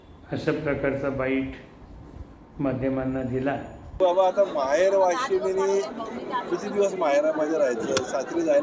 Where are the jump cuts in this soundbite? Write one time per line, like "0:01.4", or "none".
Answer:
0:04.0